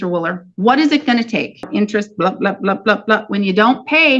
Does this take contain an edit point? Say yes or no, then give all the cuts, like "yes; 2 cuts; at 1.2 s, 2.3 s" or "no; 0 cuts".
yes; 1 cut; at 1.7 s